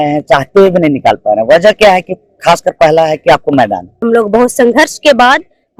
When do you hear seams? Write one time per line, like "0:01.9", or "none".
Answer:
0:04.0